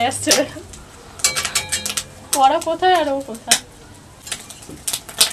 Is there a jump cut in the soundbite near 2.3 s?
no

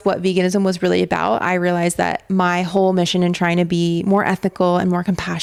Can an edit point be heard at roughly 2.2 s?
no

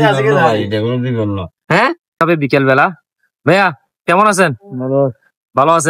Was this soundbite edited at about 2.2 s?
yes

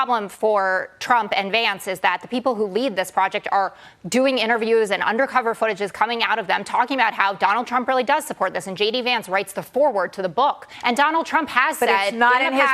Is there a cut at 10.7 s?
yes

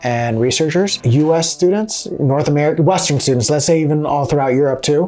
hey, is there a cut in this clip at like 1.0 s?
yes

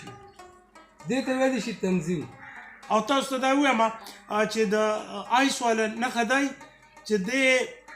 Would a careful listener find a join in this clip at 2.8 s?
yes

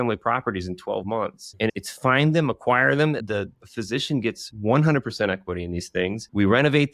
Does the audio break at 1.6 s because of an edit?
no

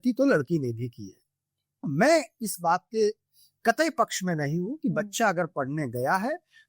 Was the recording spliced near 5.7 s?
no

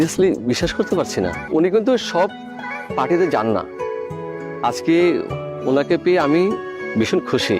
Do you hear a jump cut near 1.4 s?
yes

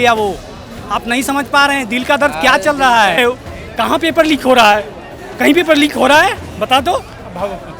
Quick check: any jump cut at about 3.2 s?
yes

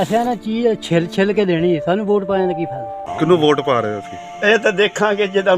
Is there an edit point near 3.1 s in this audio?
yes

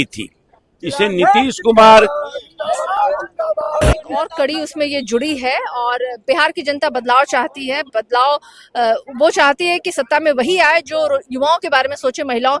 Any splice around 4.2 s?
yes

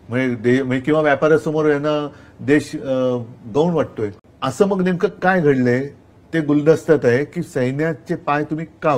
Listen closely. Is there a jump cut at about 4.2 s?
yes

